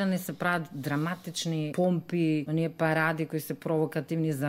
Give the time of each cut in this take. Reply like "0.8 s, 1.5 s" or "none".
1.7 s, 2.5 s